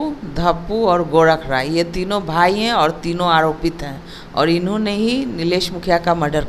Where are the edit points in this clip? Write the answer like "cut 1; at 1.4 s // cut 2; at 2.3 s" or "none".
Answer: none